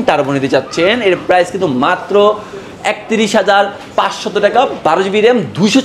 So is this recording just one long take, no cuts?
yes; 0 cuts

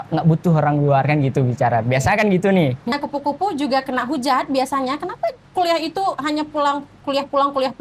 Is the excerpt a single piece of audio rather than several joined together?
no; 1 cut; at 2.9 s

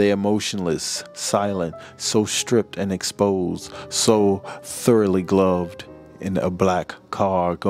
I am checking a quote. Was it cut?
no; 0 cuts

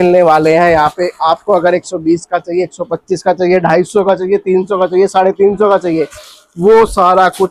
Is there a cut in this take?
no; 0 cuts

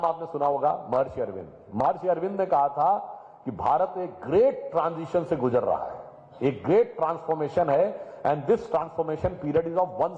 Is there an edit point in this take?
no; 0 cuts

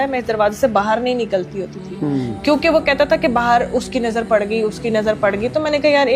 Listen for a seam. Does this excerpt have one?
no; 0 cuts

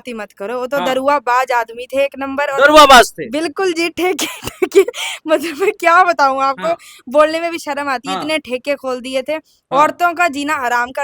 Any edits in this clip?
no; 0 cuts

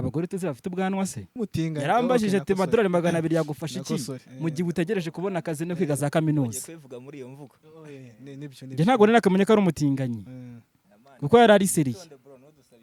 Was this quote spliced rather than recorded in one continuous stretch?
yes; 1 cut; at 1.3 s

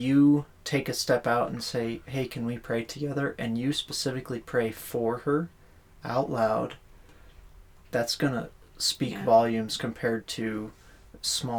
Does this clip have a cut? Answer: no; 0 cuts

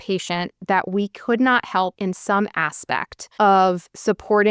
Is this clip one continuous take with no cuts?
no; 2 cuts; at 2.0 s, 3.2 s

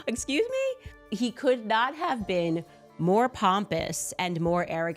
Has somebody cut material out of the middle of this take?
yes; 1 cut; at 1.0 s

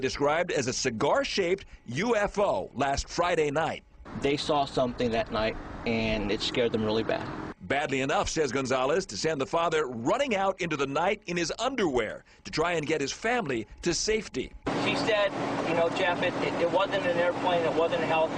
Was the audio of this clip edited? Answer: yes; 1 cut; at 6.0 s

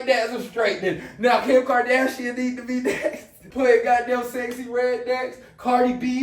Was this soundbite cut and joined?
yes; 1 cut; at 3.4 s

